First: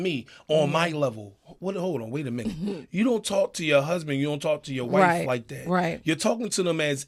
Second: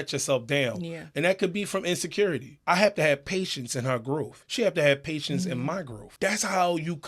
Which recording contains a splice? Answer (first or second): second